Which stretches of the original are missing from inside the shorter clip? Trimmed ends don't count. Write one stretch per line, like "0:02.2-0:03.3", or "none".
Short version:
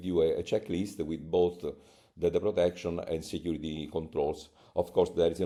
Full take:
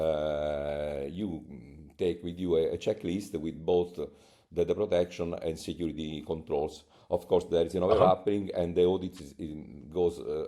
none